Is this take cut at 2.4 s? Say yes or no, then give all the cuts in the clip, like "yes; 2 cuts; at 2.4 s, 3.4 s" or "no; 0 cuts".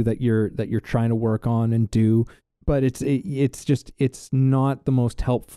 yes; 1 cut; at 2.4 s